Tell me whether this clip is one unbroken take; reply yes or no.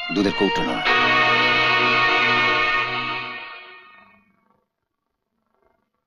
yes